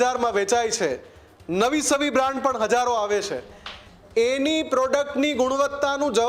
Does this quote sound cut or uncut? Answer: uncut